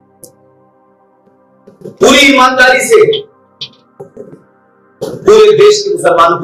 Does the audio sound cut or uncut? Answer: uncut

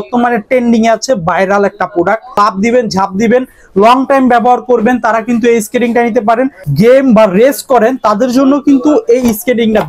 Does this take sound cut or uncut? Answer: cut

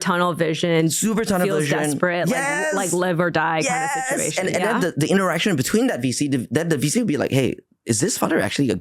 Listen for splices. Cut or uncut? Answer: uncut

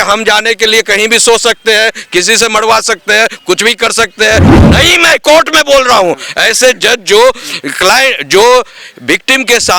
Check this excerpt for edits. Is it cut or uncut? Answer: cut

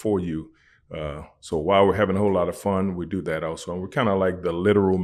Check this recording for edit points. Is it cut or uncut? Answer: uncut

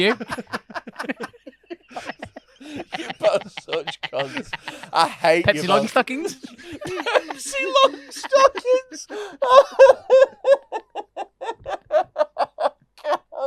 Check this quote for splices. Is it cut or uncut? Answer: uncut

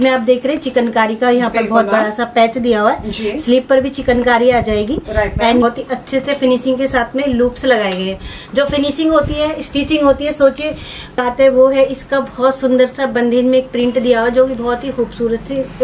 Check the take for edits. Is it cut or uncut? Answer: cut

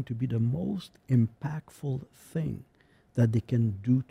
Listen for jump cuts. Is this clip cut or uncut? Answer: uncut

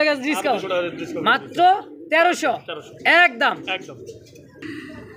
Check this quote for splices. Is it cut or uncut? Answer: uncut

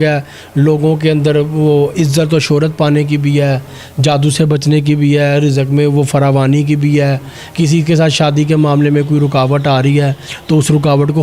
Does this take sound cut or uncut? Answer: uncut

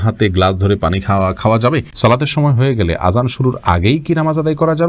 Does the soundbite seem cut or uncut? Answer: cut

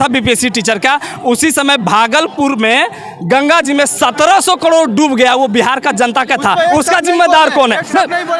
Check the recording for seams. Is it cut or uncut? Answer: uncut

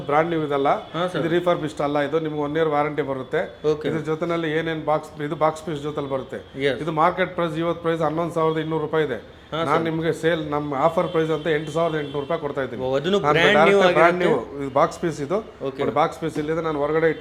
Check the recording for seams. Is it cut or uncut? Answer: uncut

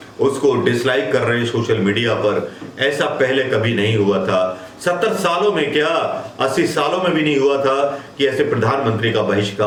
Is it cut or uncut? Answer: uncut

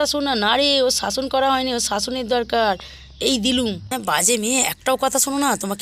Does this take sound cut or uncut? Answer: cut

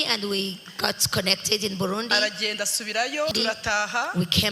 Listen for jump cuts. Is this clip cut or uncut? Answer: cut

